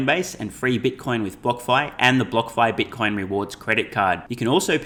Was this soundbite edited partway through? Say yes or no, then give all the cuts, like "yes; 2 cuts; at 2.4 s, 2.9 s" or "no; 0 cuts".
no; 0 cuts